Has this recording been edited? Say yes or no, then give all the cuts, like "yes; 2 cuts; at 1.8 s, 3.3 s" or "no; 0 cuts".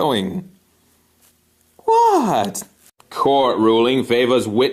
no; 0 cuts